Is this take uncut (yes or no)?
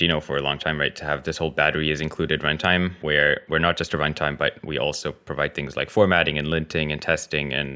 yes